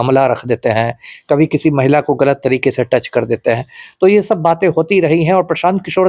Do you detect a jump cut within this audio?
no; 0 cuts

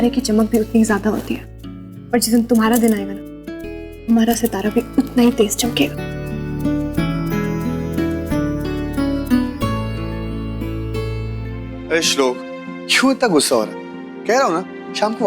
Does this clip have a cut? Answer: yes; 1 cut; at 11.6 s

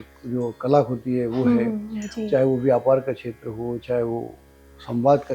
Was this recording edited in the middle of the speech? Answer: no; 0 cuts

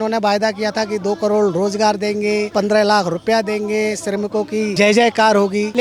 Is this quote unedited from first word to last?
yes; 0 cuts

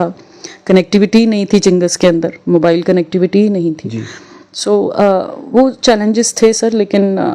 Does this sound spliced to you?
no; 0 cuts

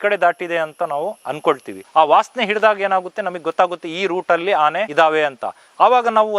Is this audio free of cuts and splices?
no; 2 cuts; at 1.7 s, 4.9 s

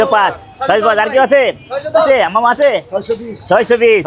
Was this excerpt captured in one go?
yes; 0 cuts

